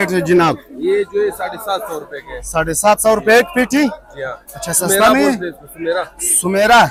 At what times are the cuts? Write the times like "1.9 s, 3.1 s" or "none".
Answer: none